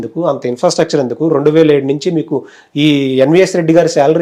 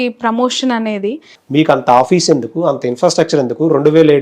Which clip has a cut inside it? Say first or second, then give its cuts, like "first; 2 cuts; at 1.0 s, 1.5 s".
second; 1 cut; at 1.3 s